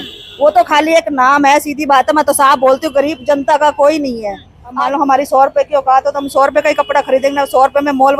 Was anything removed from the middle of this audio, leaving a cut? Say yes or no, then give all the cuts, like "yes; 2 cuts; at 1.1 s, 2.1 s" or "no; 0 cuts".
yes; 1 cut; at 4.8 s